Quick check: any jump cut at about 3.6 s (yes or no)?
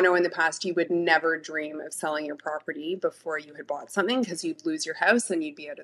no